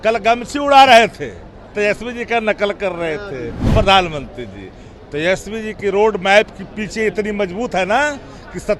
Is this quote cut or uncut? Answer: uncut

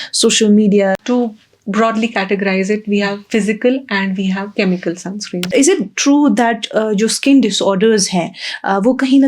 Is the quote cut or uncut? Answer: cut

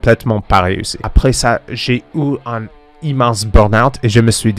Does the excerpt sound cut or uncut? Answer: cut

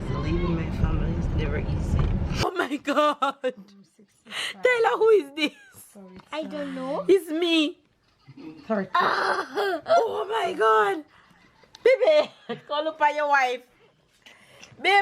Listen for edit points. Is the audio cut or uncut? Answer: cut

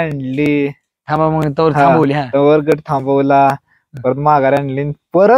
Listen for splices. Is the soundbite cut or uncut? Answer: uncut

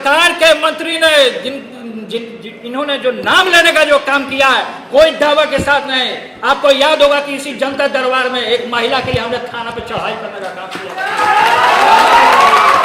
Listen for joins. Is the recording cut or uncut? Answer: uncut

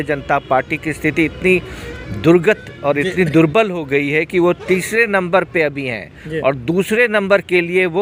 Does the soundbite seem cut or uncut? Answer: uncut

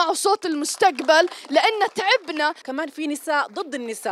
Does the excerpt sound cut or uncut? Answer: cut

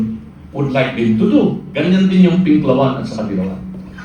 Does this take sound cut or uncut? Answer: cut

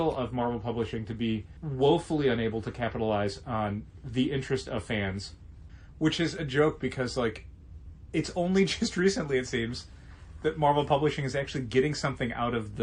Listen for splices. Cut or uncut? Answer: uncut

